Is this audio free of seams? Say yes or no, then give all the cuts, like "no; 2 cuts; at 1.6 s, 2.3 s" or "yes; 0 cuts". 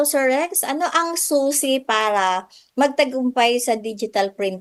yes; 0 cuts